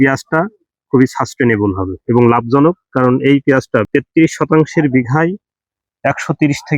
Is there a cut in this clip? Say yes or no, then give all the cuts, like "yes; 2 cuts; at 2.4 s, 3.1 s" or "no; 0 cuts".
yes; 1 cut; at 3.9 s